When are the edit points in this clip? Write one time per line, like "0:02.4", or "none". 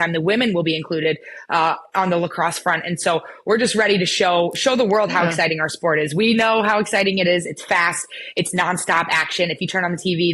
none